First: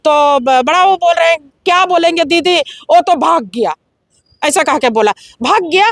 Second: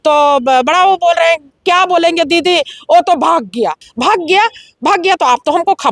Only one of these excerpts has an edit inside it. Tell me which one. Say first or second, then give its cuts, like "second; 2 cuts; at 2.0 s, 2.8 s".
second; 1 cut; at 3.9 s